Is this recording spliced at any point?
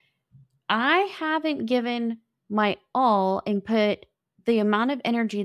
no; 0 cuts

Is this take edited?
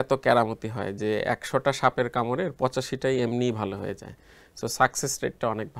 no; 0 cuts

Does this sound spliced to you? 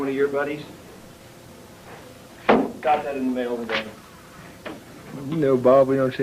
no; 0 cuts

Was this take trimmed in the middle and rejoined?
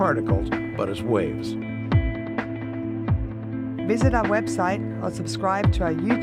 yes; 1 cut; at 3.5 s

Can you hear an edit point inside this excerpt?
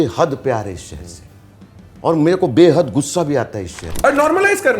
yes; 1 cut; at 3.9 s

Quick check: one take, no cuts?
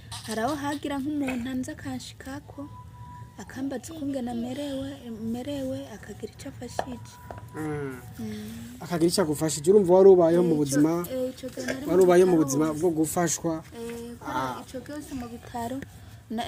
yes; 0 cuts

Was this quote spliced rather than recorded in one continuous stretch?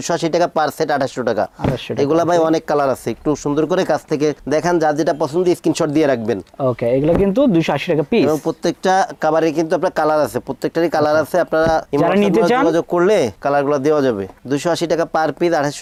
no; 0 cuts

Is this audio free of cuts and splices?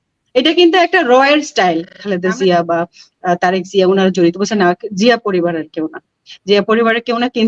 no; 1 cut; at 2.0 s

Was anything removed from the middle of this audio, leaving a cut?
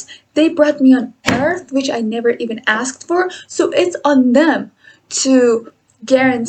no; 0 cuts

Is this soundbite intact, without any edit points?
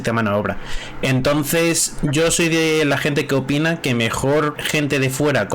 no; 1 cut; at 4.6 s

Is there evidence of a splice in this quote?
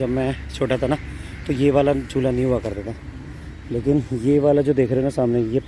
no; 0 cuts

